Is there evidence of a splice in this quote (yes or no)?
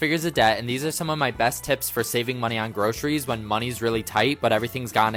no